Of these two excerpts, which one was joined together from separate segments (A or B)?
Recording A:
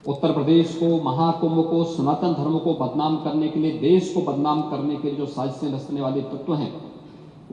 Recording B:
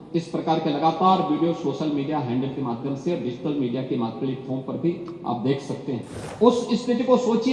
B